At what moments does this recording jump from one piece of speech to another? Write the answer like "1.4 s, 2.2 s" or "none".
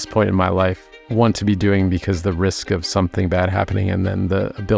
none